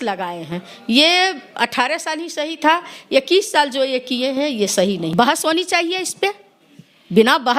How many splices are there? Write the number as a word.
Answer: one